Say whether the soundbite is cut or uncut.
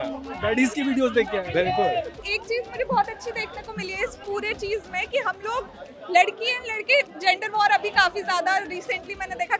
cut